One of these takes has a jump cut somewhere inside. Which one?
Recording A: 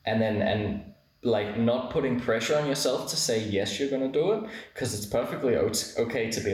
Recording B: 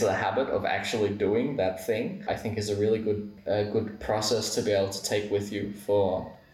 B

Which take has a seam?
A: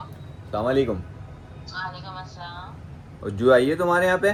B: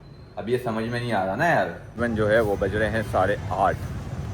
B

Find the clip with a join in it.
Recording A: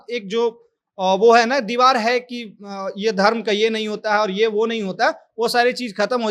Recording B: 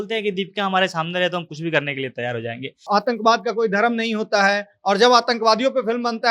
B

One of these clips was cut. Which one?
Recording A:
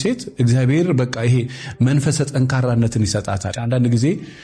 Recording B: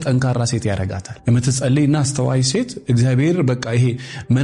A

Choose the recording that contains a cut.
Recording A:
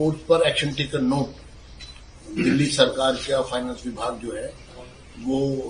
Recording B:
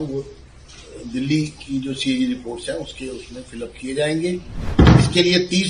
B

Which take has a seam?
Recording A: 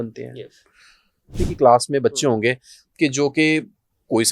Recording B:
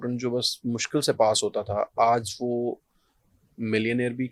A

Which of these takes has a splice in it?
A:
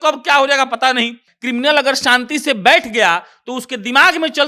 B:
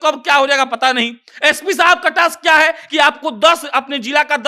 A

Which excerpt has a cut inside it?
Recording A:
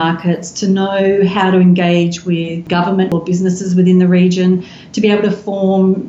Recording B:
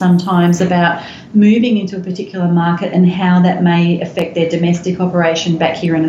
A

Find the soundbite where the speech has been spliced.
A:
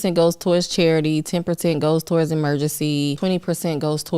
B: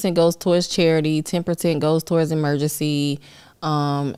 A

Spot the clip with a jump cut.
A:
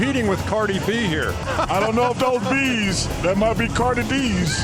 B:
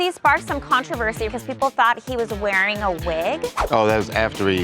B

